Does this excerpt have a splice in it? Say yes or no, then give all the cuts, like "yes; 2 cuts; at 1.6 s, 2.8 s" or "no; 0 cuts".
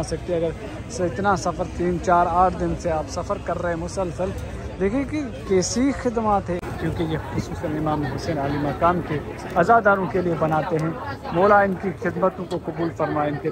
yes; 1 cut; at 6.6 s